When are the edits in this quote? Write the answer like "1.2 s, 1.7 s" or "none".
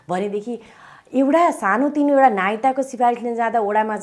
none